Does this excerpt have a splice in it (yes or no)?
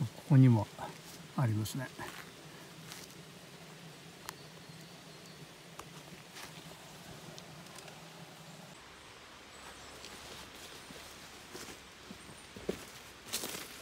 yes